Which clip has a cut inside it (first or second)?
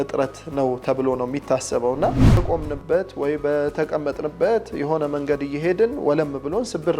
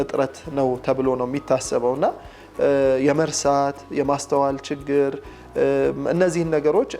first